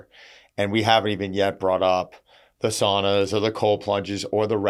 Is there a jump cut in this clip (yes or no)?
no